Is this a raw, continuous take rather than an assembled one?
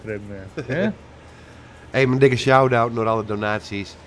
yes; 0 cuts

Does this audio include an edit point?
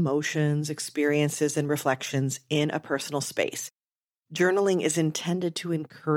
yes; 1 cut; at 3.7 s

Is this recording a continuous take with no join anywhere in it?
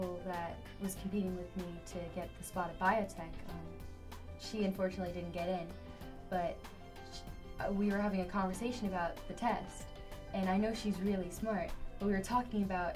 yes; 0 cuts

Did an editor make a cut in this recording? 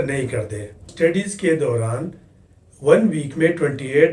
yes; 1 cut; at 0.9 s

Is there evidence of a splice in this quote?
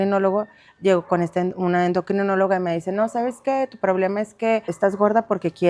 yes; 1 cut; at 4.7 s

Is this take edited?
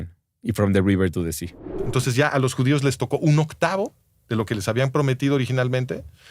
yes; 1 cut; at 1.8 s

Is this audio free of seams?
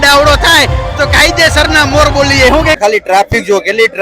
no; 1 cut; at 2.8 s

